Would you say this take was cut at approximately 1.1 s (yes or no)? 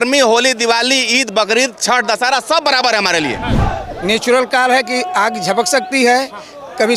no